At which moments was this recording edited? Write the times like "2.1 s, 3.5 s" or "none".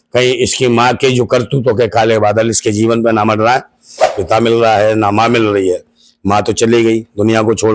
4.1 s